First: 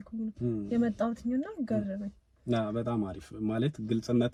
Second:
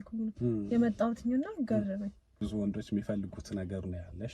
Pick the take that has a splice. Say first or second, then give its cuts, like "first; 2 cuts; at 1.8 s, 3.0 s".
second; 1 cut; at 2.3 s